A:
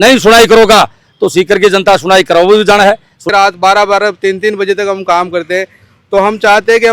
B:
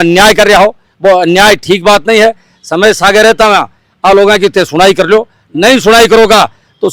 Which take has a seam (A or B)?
A